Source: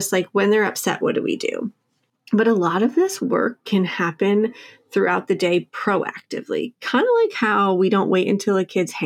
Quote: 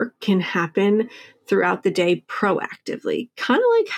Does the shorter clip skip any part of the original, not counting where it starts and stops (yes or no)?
no